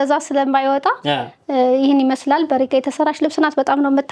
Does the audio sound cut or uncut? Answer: uncut